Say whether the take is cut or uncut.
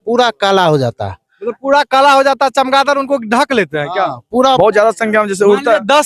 cut